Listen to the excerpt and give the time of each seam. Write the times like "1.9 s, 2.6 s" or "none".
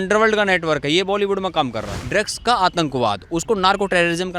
2.0 s